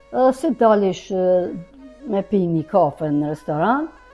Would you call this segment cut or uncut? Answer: uncut